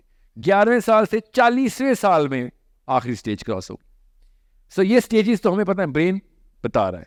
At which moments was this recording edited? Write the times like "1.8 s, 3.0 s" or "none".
none